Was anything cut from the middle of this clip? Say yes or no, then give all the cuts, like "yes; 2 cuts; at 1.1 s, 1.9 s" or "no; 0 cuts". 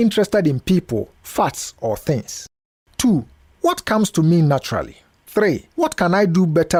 no; 0 cuts